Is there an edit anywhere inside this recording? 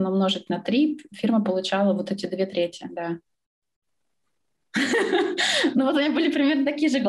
no; 0 cuts

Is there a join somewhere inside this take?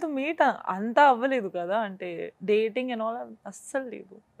no; 0 cuts

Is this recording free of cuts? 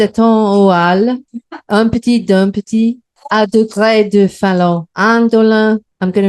no; 1 cut; at 3.1 s

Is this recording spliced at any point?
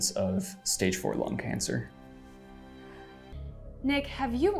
yes; 1 cut; at 3.3 s

